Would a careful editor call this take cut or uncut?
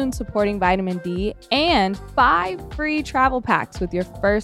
cut